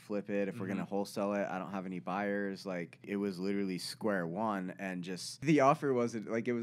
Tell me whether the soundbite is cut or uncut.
cut